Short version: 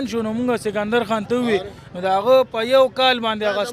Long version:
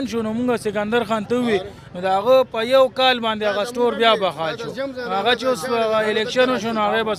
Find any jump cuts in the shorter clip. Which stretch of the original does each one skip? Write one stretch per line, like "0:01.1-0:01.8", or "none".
none